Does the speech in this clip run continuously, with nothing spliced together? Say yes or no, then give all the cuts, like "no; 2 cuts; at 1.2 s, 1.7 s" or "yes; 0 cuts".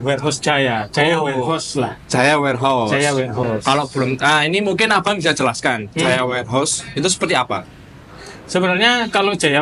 yes; 0 cuts